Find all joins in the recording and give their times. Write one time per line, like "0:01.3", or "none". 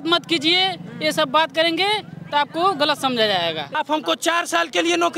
0:03.8